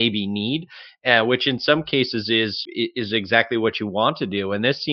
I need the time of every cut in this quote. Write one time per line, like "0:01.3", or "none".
0:02.6